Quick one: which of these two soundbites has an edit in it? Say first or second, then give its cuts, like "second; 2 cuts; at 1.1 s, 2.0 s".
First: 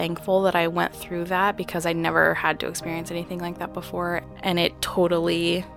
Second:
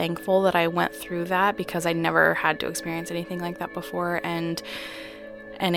first; 1 cut; at 4.2 s